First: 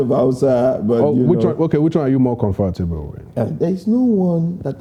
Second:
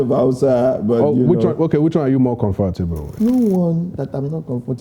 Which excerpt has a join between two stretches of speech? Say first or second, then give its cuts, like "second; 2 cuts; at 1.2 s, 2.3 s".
second; 1 cut; at 3.1 s